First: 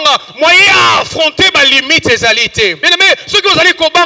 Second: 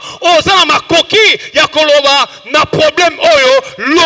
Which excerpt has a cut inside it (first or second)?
first